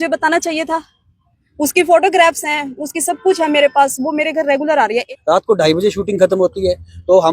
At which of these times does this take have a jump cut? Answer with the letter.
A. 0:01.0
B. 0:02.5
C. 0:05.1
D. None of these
C